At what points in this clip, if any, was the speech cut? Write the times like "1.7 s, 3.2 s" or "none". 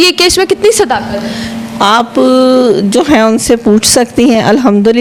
none